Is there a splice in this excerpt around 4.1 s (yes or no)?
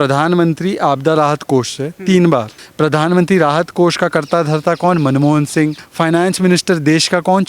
no